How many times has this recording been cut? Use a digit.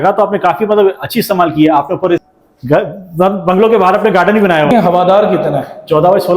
2